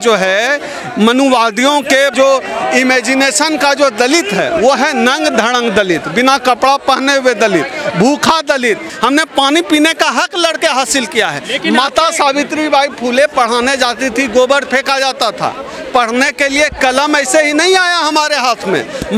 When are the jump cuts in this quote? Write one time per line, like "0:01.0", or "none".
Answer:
0:08.9

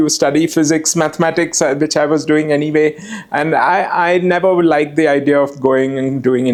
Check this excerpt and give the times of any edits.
none

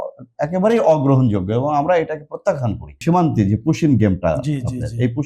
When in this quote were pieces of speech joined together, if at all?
0:03.0

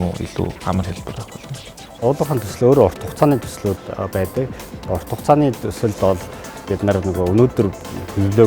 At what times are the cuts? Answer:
0:01.8

